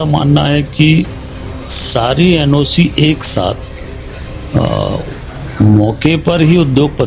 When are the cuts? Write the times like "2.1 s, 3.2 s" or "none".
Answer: none